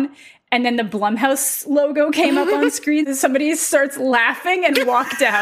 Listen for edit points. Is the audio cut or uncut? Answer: cut